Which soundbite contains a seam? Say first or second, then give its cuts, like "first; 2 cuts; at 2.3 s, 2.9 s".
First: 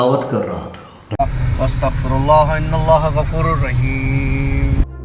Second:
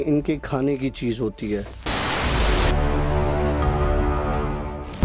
first; 1 cut; at 1.0 s